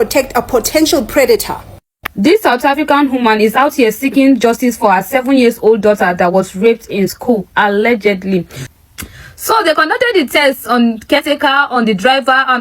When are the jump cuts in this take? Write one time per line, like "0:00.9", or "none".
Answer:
0:02.0
0:08.6